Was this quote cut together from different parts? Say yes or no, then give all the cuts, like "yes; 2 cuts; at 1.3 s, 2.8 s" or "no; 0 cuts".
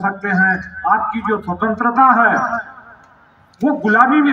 no; 0 cuts